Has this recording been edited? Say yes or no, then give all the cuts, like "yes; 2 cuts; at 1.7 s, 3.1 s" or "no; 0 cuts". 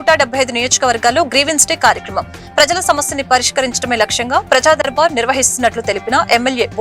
no; 0 cuts